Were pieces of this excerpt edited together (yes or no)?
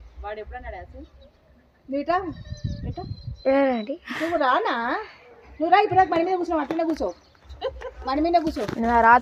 no